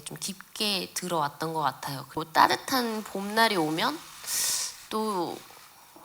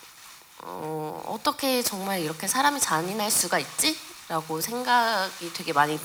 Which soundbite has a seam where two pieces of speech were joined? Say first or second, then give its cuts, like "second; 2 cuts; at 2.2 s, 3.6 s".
first; 1 cut; at 2.1 s